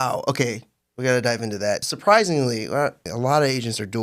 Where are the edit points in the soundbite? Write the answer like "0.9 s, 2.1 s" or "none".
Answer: 1.9 s, 3.0 s